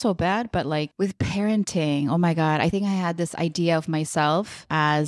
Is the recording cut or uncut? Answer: cut